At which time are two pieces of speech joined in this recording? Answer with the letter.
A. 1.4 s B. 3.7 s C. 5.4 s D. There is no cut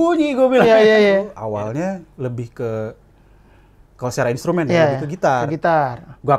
A